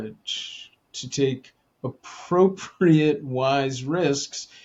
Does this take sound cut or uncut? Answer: uncut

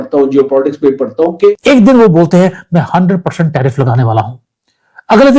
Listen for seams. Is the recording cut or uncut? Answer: cut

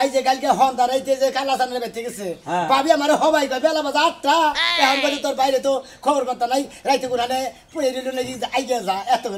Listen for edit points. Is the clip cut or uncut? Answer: uncut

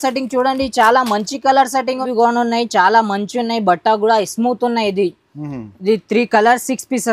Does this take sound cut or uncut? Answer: cut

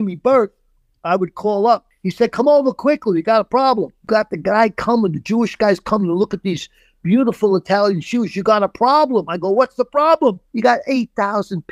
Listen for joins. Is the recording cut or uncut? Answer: cut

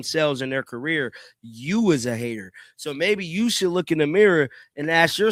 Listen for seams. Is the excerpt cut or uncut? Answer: uncut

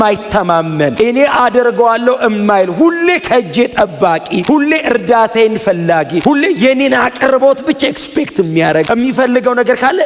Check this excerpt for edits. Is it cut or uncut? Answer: cut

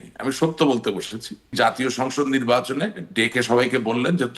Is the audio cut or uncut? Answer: cut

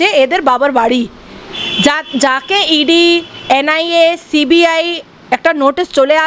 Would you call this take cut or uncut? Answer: uncut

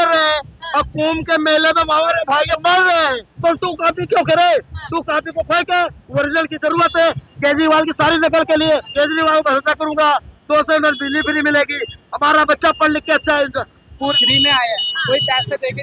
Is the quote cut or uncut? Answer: cut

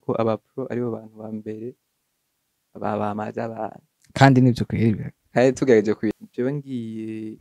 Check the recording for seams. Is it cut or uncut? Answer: cut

